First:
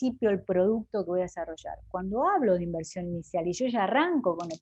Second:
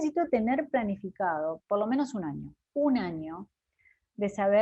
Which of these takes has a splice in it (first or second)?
second